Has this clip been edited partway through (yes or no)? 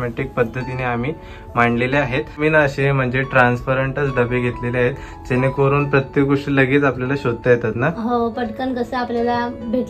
yes